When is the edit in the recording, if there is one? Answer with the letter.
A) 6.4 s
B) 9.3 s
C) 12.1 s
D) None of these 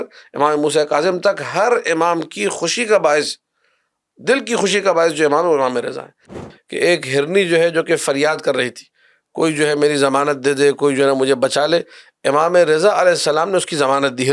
A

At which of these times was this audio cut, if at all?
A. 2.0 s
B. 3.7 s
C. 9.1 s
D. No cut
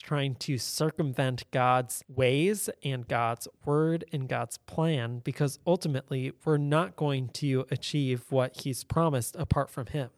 A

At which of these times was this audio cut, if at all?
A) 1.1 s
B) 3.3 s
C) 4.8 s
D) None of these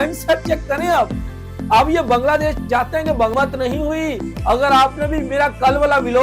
B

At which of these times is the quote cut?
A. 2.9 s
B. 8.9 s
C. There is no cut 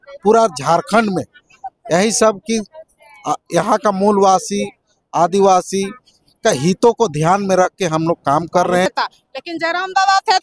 B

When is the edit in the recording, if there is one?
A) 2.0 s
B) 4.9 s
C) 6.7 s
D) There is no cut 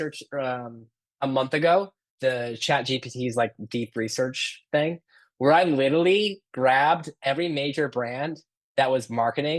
A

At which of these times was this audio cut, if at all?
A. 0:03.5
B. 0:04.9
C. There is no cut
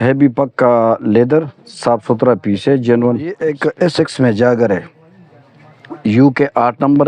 A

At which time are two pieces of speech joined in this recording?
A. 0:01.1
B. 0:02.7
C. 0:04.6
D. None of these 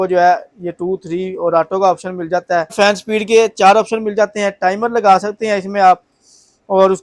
B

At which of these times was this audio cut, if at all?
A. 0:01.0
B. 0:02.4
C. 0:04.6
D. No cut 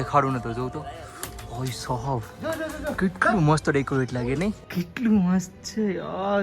C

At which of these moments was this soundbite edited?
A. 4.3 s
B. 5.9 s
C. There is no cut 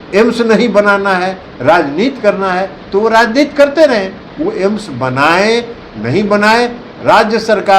A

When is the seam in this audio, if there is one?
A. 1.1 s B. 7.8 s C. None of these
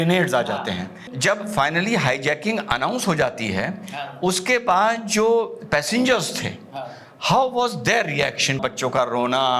A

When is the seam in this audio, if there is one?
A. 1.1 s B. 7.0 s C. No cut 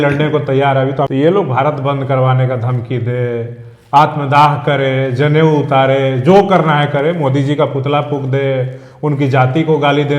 A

